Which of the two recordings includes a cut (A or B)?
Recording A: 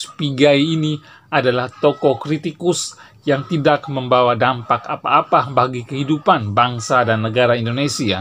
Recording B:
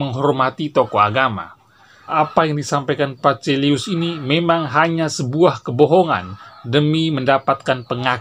B